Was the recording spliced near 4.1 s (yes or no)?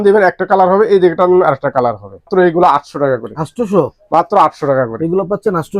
no